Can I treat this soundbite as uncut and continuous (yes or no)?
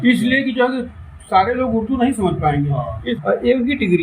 no